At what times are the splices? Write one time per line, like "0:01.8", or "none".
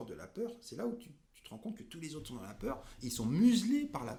none